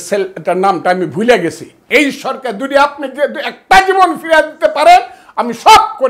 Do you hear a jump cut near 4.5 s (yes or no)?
no